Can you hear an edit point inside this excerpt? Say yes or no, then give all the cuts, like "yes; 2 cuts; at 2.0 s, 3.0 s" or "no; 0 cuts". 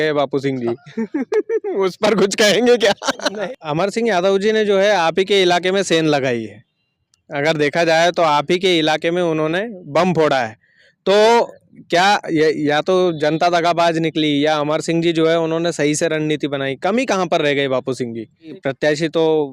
yes; 2 cuts; at 3.4 s, 18.6 s